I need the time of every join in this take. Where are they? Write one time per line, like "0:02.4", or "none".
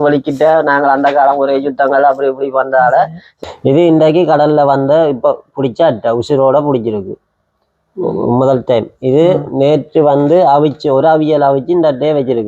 0:03.2